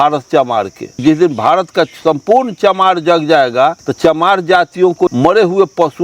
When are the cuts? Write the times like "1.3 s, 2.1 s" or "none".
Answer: 1.0 s, 3.9 s, 5.1 s